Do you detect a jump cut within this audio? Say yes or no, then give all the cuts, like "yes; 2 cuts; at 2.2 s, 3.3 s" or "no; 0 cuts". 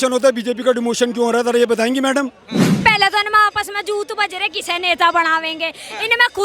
yes; 1 cut; at 2.8 s